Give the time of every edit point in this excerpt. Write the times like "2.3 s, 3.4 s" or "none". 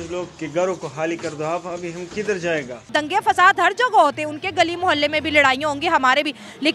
2.8 s

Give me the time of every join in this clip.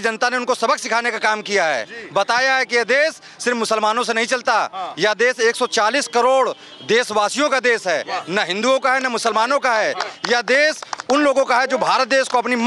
none

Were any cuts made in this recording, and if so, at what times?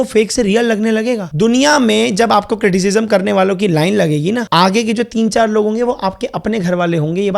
1.3 s, 4.5 s

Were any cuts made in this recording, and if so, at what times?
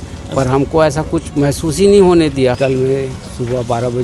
2.6 s

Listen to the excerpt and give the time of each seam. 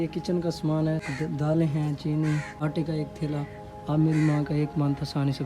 1.1 s, 2.5 s

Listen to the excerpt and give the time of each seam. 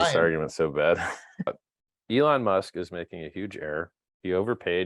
1.5 s

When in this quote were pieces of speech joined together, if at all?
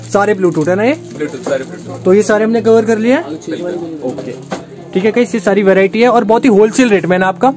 none

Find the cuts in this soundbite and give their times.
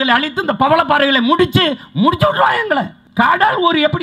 3.0 s

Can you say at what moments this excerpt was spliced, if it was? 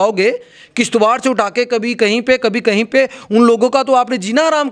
none

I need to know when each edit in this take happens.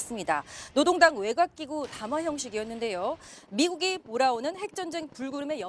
1.9 s

